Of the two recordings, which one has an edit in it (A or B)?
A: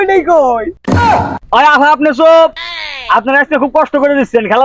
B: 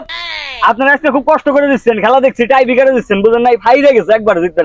A